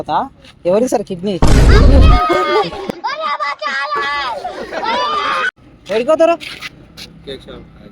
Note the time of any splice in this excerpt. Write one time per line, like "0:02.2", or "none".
0:05.5